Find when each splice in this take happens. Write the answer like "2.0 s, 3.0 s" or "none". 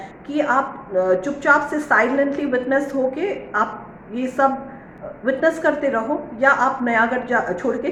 none